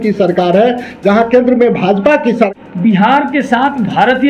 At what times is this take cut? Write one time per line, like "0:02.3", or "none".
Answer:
0:02.4